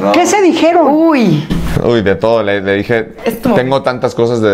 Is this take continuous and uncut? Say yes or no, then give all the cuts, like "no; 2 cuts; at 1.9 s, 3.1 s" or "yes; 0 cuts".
yes; 0 cuts